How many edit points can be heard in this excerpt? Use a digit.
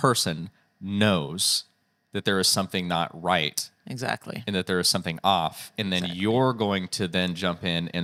0